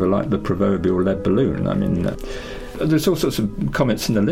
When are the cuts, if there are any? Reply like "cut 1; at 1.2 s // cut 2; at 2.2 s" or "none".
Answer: cut 1; at 2.1 s